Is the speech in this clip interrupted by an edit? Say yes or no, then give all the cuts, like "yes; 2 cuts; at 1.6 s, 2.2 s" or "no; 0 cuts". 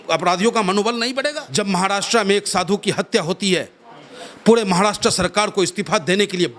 yes; 1 cut; at 1.4 s